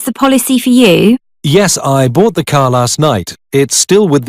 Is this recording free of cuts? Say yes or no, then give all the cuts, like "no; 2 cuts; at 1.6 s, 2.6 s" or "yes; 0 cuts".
yes; 0 cuts